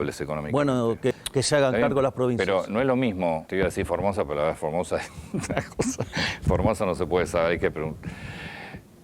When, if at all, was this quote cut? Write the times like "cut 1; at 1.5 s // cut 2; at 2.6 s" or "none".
cut 1; at 1.1 s // cut 2; at 3.4 s